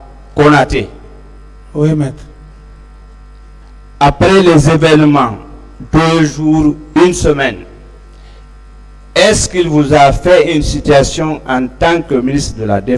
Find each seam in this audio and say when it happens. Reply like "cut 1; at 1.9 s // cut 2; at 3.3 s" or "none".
cut 1; at 3.6 s